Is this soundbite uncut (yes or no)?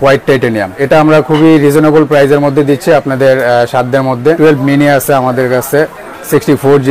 no